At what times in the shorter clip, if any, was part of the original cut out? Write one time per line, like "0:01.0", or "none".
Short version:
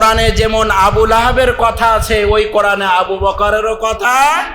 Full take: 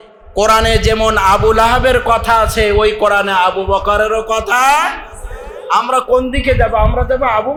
none